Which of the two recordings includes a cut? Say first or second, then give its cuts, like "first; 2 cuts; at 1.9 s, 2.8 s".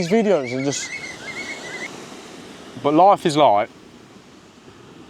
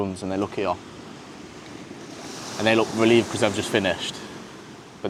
first; 1 cut; at 1.9 s